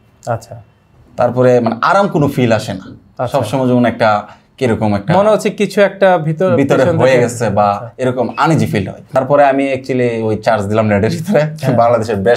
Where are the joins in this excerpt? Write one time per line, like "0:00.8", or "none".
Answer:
0:09.1